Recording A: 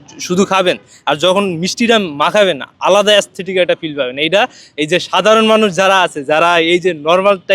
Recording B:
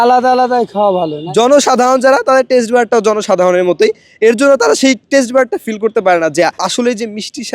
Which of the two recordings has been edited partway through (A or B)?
B